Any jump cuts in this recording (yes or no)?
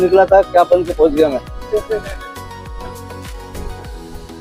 no